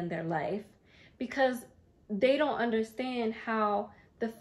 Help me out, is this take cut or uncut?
uncut